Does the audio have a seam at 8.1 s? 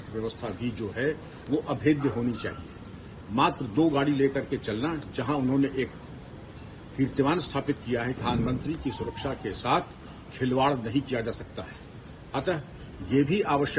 yes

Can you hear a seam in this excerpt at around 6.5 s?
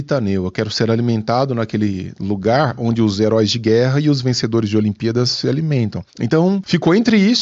yes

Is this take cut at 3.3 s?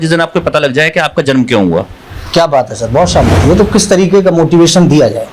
yes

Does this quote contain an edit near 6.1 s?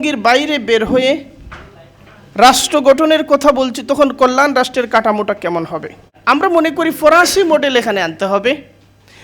yes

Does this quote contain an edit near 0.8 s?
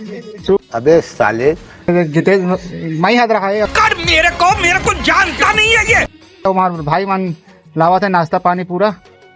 no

